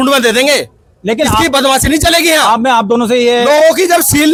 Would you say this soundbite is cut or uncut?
uncut